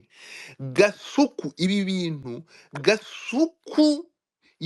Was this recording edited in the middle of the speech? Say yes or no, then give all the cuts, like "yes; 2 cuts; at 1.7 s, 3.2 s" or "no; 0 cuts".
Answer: no; 0 cuts